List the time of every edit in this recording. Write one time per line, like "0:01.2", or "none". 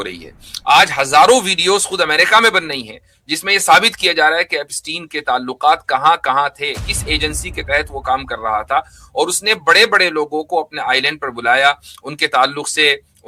none